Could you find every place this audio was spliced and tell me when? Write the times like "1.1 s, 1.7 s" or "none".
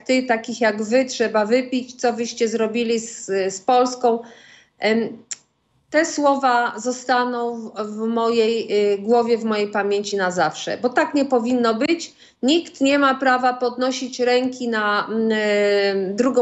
none